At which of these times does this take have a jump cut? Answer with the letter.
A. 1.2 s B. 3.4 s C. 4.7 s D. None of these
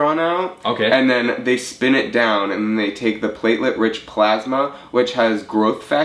D